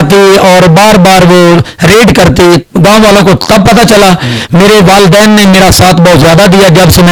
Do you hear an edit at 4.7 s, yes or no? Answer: no